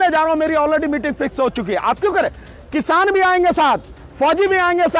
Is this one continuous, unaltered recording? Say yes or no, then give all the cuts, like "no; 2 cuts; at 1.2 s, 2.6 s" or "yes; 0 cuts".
yes; 0 cuts